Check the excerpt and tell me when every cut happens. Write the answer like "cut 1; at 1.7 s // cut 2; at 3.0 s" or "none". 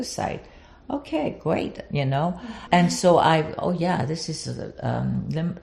cut 1; at 2.5 s